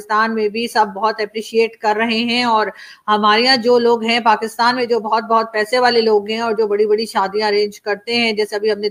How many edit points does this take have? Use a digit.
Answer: 0